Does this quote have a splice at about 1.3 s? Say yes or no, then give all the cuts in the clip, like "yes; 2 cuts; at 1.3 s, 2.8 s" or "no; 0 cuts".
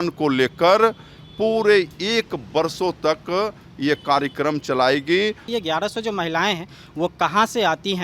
no; 1 cut; at 5.4 s